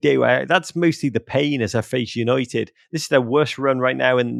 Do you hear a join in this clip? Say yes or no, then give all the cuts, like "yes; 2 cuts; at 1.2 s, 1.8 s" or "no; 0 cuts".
no; 0 cuts